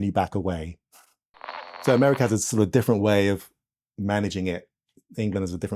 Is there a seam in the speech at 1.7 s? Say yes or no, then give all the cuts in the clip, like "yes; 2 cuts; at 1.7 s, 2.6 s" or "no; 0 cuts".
yes; 1 cut; at 1.7 s